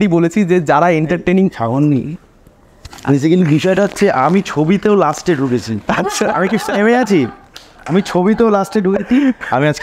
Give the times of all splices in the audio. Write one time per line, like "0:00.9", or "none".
none